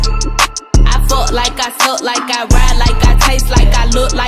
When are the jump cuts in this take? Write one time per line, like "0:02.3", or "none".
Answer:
none